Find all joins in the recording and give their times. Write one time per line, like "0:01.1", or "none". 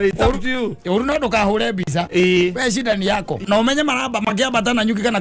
0:03.4